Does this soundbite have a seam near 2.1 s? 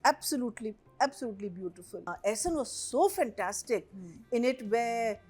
yes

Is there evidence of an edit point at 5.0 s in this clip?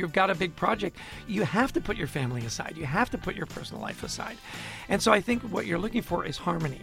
no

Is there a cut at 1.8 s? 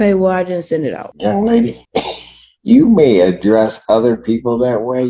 yes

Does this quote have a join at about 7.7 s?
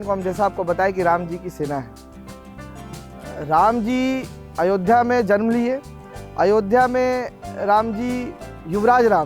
no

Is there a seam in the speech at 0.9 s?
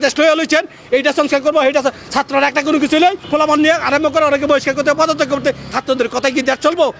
no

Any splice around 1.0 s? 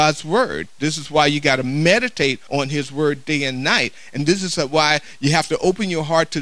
no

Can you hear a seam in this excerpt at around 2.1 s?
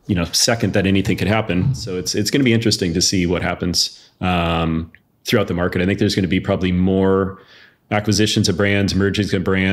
yes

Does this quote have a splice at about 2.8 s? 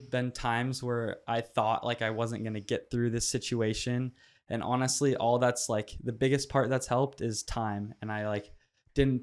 no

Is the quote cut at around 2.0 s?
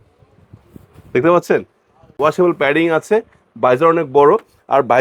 yes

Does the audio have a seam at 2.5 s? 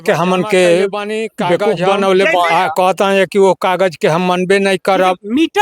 yes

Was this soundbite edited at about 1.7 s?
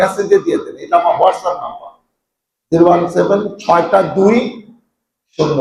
no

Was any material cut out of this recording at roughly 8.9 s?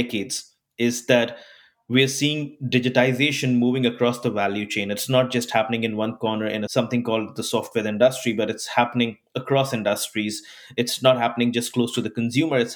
no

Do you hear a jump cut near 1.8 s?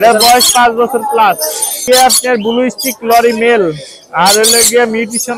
yes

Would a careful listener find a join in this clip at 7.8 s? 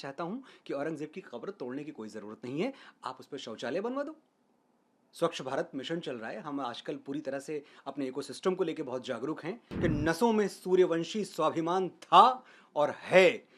no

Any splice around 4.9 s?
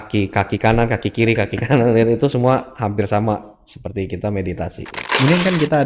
yes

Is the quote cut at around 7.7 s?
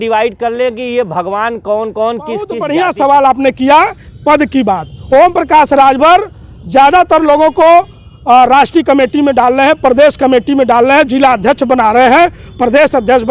no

